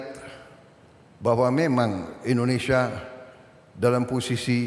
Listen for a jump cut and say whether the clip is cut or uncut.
uncut